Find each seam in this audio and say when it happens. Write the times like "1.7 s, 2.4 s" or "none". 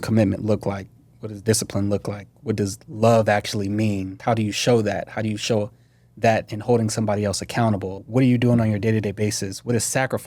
4.1 s, 8.0 s